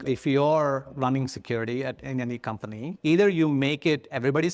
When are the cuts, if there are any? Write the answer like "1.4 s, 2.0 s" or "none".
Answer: 2.9 s